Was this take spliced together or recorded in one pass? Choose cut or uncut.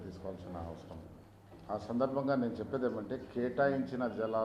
cut